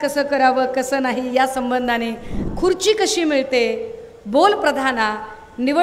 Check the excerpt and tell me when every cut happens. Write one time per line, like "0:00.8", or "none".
0:02.3